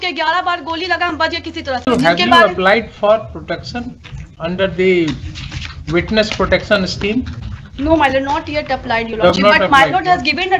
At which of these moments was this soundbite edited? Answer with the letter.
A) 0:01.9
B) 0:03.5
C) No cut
A